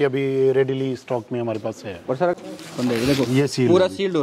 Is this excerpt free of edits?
no; 1 cut; at 2.3 s

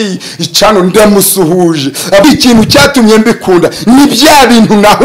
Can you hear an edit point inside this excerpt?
yes; 1 cut; at 2.2 s

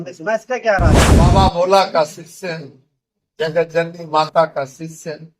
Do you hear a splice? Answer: yes; 1 cut; at 1.0 s

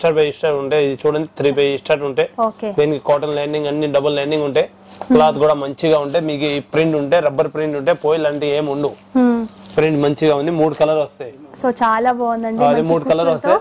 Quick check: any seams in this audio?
no; 0 cuts

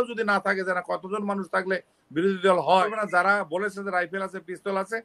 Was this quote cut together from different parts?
yes; 1 cut; at 2.8 s

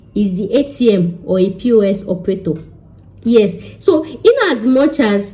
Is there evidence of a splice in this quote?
no; 0 cuts

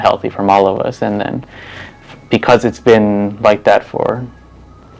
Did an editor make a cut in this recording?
no; 0 cuts

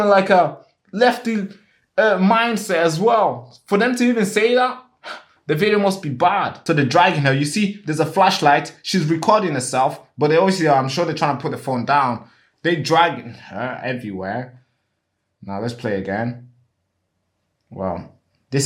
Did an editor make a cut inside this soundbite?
yes; 1 cut; at 6.5 s

